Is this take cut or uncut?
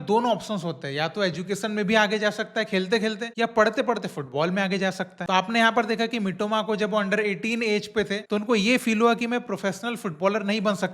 cut